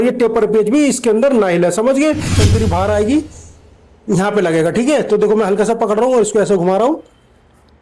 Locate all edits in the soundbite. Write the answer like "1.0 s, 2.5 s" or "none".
2.4 s